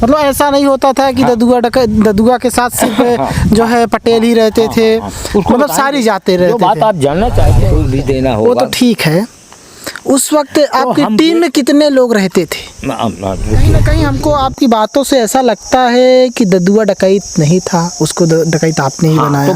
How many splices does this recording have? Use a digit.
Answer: 2